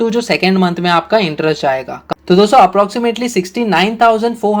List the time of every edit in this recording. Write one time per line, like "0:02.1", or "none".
0:02.0